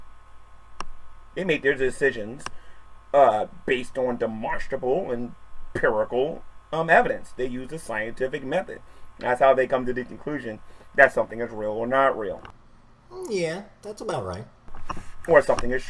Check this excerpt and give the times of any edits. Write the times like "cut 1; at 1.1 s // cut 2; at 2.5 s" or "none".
cut 1; at 2.2 s